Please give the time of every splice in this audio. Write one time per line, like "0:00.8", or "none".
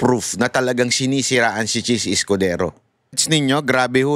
0:03.2